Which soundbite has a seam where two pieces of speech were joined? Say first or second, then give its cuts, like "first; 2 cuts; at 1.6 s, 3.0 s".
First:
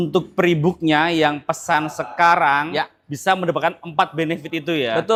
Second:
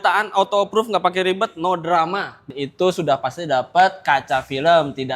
second; 1 cut; at 2.4 s